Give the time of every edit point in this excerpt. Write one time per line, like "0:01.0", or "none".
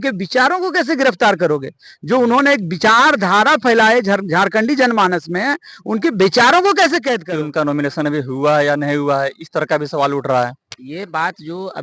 0:07.2